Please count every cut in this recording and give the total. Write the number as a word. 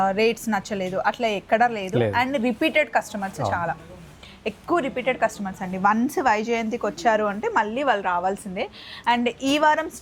zero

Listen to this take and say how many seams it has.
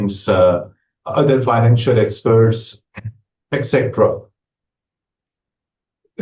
zero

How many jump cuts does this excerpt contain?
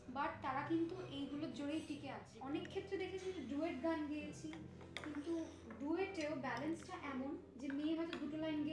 one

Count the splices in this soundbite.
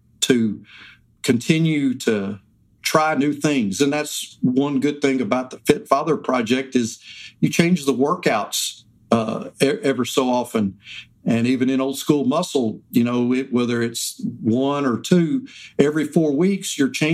zero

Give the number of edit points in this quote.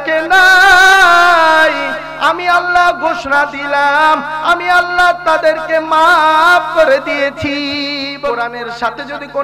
one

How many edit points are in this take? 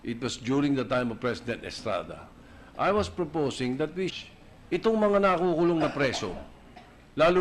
zero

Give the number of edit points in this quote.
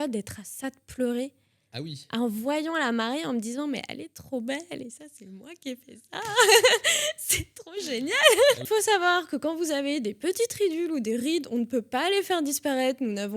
one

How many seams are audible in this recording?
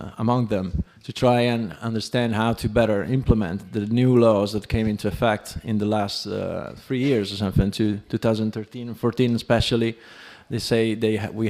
one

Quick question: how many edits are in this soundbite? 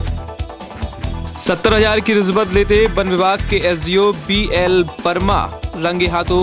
one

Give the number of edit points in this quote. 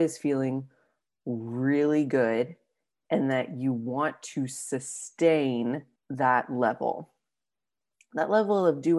one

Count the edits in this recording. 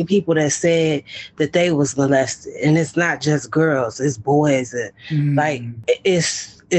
one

